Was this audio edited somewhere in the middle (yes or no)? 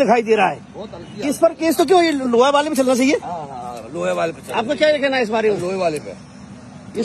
no